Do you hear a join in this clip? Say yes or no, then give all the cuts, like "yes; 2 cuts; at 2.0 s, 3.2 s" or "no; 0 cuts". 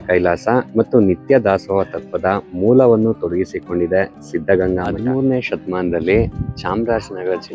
yes; 1 cut; at 4.9 s